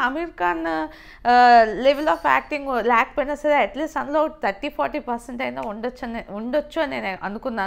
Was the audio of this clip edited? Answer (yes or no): no